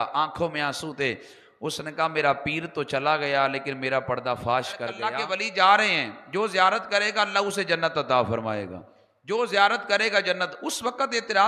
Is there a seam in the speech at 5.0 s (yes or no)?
yes